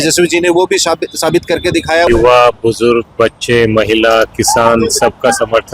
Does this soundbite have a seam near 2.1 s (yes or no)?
yes